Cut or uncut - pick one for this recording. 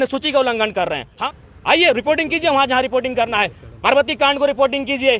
cut